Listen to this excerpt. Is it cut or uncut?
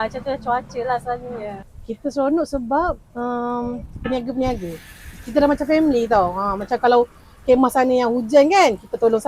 cut